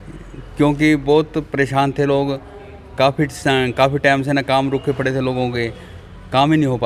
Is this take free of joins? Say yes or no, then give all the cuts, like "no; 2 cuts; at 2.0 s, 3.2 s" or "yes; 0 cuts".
yes; 0 cuts